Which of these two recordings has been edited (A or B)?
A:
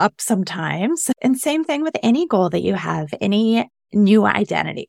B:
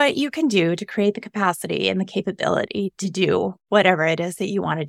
A